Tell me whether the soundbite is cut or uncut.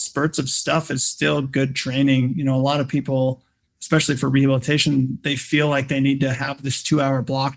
uncut